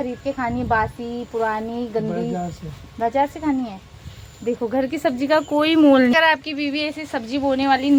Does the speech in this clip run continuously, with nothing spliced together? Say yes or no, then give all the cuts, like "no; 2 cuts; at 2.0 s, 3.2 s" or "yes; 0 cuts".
yes; 0 cuts